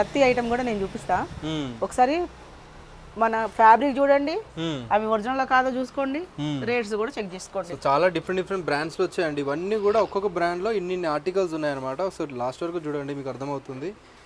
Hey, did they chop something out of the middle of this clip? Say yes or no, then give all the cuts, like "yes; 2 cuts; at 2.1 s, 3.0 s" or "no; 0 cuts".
no; 0 cuts